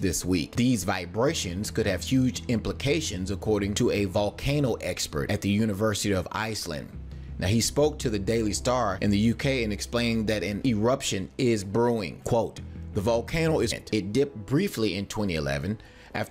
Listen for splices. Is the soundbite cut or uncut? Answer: uncut